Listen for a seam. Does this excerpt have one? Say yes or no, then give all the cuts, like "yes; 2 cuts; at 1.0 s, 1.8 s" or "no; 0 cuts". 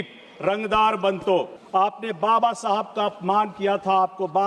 yes; 1 cut; at 1.6 s